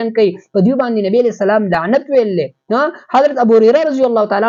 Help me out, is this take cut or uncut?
uncut